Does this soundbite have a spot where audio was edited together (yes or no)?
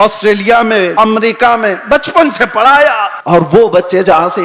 yes